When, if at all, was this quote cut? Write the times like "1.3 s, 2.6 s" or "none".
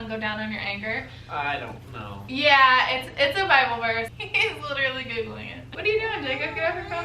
4.1 s, 5.8 s

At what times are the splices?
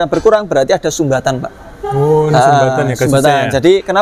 none

